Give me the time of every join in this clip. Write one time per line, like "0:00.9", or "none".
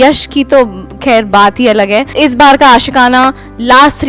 0:02.1